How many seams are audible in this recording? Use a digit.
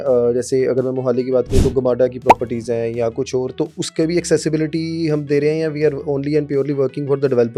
0